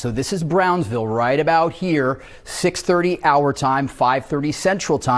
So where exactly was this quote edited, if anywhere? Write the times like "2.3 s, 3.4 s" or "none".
3.2 s